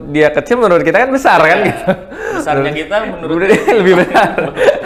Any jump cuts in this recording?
no; 0 cuts

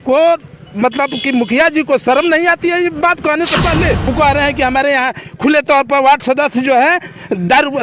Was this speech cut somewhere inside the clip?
yes; 1 cut; at 4.0 s

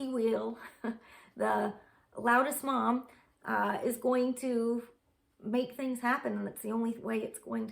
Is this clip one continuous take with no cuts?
yes; 0 cuts

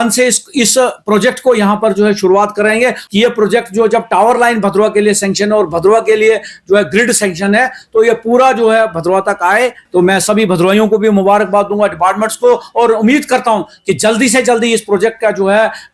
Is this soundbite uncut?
no; 2 cuts; at 3.0 s, 9.8 s

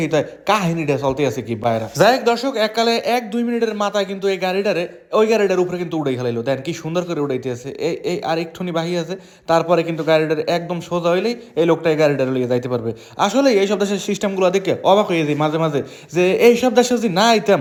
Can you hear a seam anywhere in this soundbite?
no; 0 cuts

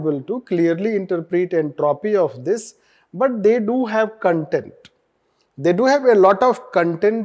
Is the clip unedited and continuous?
yes; 0 cuts

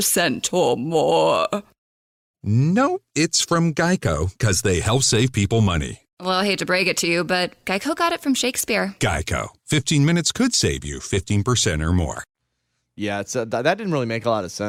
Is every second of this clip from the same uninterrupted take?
yes; 0 cuts

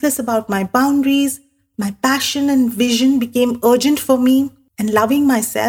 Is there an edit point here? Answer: yes; 1 cut; at 4.6 s

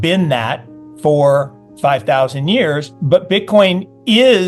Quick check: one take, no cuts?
no; 1 cut; at 2.9 s

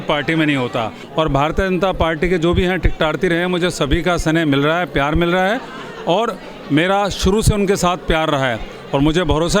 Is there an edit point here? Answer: yes; 1 cut; at 1.0 s

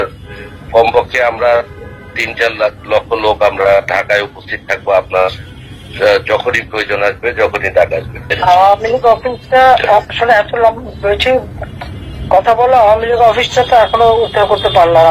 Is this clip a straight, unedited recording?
no; 1 cut; at 8.3 s

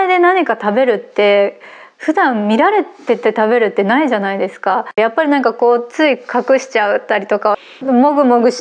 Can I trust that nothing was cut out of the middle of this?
no; 2 cuts; at 5.0 s, 7.7 s

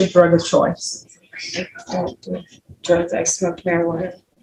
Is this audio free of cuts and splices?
yes; 0 cuts

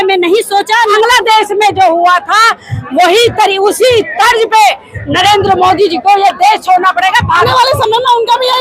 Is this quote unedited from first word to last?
no; 2 cuts; at 0.9 s, 7.4 s

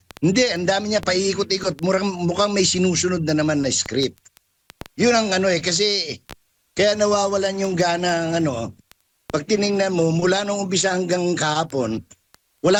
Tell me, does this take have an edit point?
no; 0 cuts

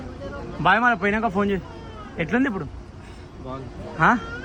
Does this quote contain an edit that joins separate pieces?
no; 0 cuts

